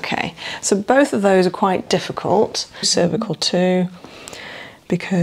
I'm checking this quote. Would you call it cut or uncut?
cut